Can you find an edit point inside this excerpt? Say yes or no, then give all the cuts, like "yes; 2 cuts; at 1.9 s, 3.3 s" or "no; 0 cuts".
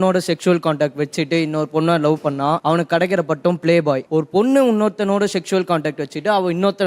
yes; 2 cuts; at 2.6 s, 4.0 s